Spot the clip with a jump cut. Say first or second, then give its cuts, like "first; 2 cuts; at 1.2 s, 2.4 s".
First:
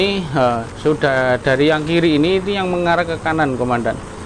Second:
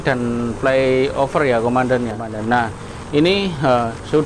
second; 1 cut; at 2.3 s